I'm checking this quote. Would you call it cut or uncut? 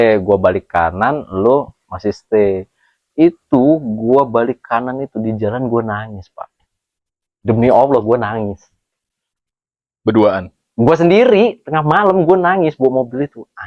uncut